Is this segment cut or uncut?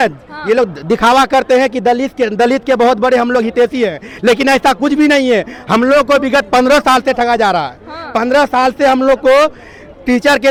uncut